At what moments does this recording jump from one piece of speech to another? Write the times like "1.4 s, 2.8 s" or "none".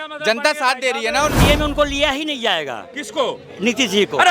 1.4 s

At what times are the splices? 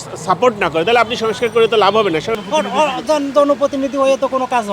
2.3 s

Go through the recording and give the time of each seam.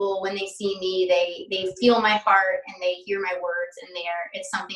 none

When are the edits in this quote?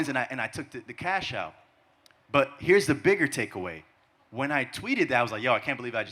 none

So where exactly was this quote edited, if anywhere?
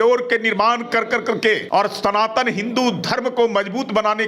1.6 s

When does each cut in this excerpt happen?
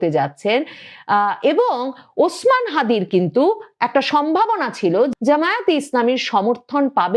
5.1 s

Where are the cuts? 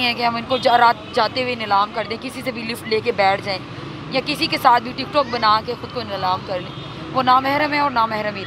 none

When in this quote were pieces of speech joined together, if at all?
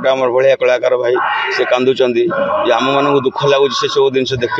none

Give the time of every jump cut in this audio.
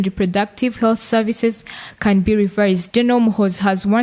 2.8 s

